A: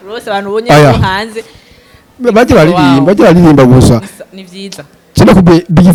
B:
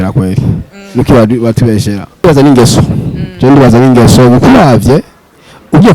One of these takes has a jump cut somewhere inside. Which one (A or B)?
B